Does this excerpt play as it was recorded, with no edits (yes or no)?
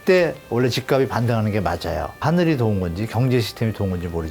no